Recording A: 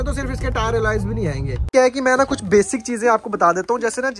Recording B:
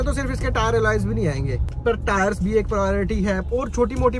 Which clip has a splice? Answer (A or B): A